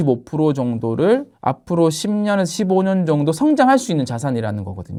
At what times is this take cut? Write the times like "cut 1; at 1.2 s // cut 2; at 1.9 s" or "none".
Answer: none